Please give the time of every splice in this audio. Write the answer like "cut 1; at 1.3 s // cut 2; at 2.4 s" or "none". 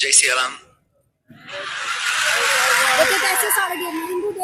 none